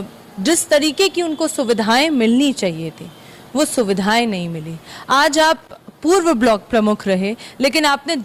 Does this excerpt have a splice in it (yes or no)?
no